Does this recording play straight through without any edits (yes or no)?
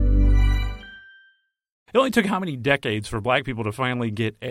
no